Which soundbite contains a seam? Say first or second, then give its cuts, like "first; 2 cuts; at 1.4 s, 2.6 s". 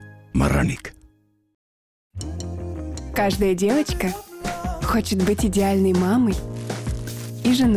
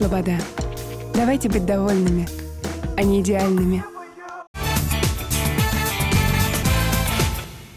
second; 1 cut; at 4.6 s